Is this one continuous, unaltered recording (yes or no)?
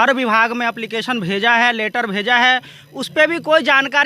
yes